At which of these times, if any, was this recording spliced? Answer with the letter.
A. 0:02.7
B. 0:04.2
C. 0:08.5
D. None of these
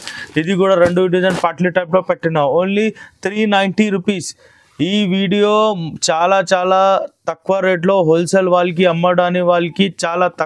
D